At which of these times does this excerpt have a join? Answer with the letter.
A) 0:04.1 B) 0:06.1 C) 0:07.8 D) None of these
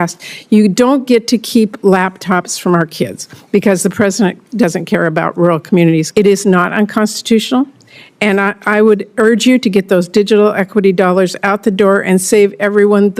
B